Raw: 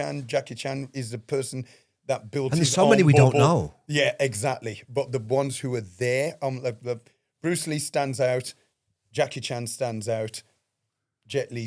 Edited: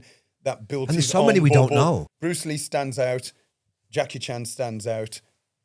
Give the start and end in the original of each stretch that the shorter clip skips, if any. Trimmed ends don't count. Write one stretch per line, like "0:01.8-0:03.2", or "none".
0:03.7-0:07.3